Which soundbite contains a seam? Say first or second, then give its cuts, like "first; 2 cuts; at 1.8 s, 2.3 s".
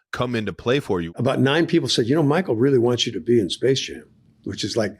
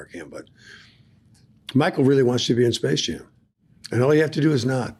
first; 1 cut; at 1.1 s